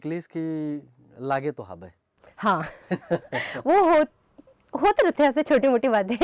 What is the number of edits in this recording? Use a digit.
0